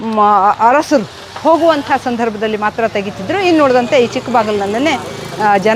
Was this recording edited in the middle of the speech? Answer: no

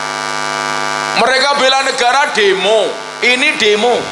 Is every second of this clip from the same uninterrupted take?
yes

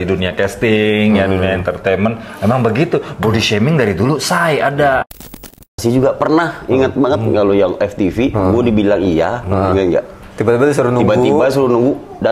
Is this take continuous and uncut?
no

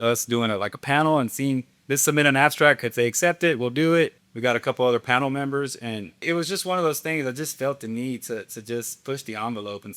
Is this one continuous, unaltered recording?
no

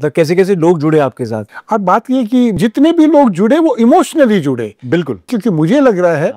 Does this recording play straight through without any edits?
no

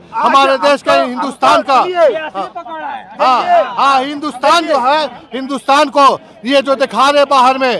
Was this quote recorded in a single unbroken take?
yes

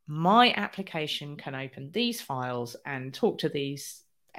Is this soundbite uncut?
yes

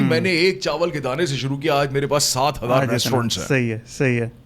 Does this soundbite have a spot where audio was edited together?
no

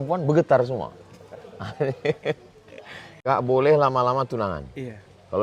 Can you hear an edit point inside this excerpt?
yes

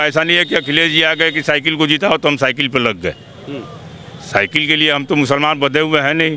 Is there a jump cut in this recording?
no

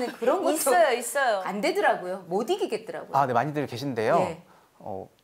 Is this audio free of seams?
no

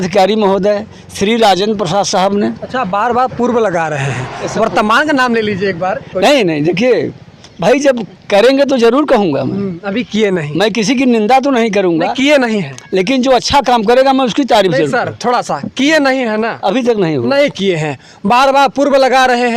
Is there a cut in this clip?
no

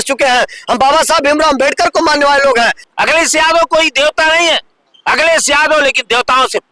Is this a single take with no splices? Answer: no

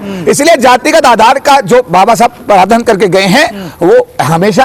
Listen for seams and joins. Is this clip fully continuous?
yes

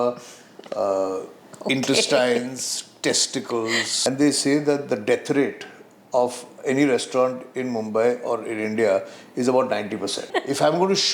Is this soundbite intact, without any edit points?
no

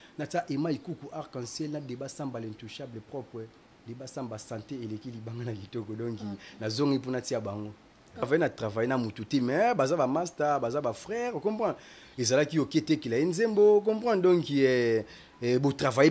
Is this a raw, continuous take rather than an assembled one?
no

